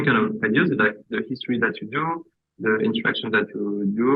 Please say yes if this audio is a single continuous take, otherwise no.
yes